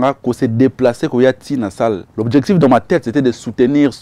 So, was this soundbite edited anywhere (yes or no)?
yes